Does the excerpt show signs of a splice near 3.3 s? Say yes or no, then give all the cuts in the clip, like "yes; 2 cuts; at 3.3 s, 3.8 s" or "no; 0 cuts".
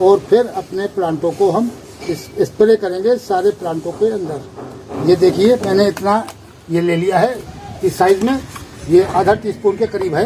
no; 2 cuts; at 4.9 s, 7.4 s